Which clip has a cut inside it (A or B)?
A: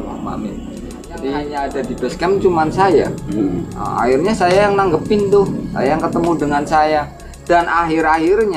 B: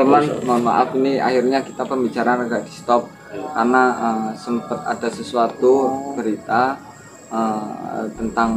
A